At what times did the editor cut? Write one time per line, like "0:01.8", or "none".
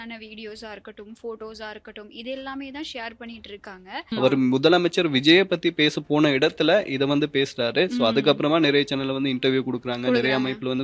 0:04.1